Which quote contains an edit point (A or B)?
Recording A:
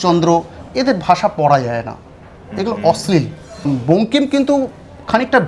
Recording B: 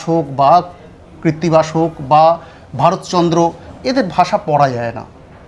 A